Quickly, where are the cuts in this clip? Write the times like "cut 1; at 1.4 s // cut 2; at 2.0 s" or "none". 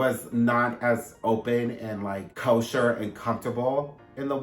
cut 1; at 2.3 s